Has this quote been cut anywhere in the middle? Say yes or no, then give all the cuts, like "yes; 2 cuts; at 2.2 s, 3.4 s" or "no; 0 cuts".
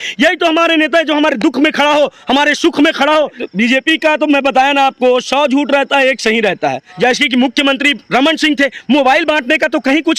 yes; 2 cuts; at 3.4 s, 6.9 s